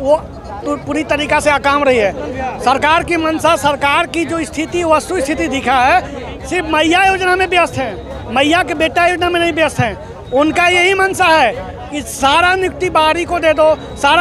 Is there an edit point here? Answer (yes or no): no